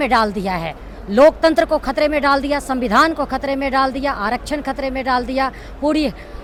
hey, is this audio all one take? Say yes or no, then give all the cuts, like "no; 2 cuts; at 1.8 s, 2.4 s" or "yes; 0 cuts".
yes; 0 cuts